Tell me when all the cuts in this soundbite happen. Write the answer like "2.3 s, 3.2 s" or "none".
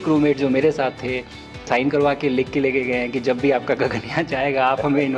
1.6 s